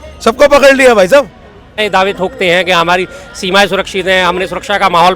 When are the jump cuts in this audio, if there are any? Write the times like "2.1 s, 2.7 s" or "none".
1.8 s